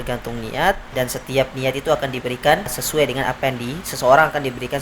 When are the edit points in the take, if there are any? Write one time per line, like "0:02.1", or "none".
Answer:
0:00.9
0:02.8